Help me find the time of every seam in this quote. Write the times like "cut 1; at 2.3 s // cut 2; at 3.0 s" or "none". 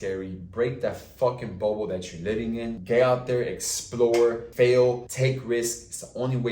cut 1; at 2.8 s // cut 2; at 4.4 s // cut 3; at 5.1 s